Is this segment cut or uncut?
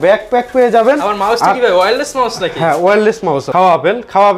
cut